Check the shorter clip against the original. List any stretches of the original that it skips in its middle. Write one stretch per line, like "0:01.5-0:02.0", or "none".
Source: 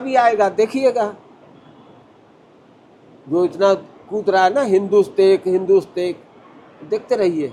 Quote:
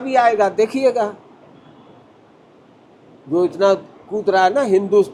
none